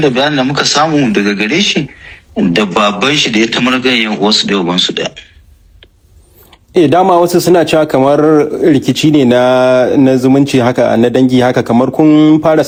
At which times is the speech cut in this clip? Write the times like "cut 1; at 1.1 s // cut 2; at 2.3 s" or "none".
none